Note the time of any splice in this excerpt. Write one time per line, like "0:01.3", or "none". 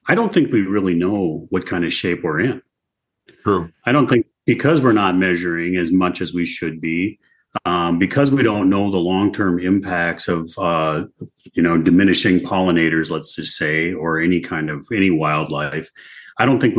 none